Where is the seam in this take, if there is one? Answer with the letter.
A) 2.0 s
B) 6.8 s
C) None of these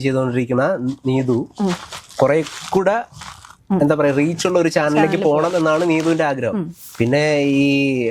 B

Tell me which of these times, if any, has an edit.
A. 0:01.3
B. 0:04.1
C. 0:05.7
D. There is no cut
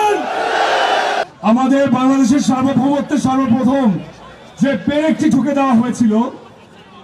A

